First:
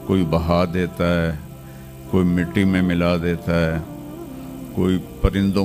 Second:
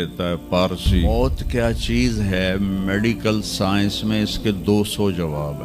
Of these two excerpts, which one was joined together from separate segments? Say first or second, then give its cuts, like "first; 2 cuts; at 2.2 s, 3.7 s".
second; 1 cut; at 1.1 s